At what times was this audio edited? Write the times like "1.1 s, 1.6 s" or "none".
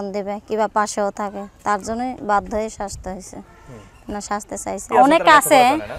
4.9 s